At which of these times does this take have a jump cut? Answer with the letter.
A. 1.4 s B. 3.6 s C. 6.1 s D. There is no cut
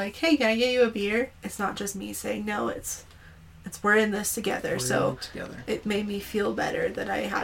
A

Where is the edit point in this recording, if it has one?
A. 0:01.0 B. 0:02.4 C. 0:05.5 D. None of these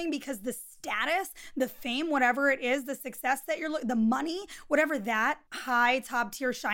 C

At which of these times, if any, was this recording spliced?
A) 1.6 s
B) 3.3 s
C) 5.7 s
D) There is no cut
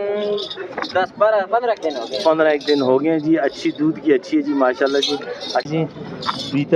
C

